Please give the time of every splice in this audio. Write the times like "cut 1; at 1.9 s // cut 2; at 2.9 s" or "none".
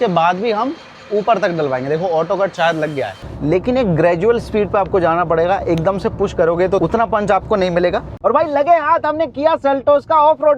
cut 1; at 3.3 s // cut 2; at 6.8 s // cut 3; at 8.1 s